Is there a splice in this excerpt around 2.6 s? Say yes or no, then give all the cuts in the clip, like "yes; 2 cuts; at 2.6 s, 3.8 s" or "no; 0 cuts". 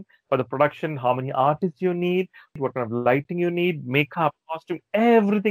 yes; 1 cut; at 2.6 s